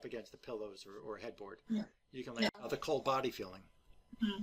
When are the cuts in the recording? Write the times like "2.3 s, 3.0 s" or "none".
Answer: 2.7 s